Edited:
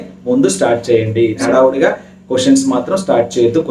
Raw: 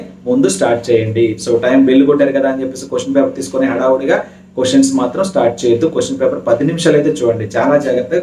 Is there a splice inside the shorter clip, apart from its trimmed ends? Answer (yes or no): yes